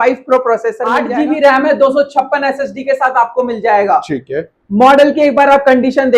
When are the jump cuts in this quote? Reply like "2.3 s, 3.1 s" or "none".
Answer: 1.0 s